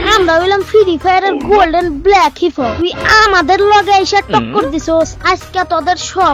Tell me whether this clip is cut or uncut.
uncut